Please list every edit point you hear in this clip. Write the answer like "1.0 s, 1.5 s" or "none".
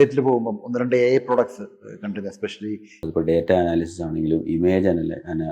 3.0 s